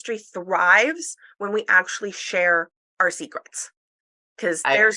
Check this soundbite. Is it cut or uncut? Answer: uncut